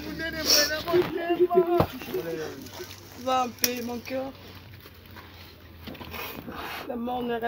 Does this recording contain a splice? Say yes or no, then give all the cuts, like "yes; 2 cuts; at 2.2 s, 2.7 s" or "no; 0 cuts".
yes; 1 cut; at 2.6 s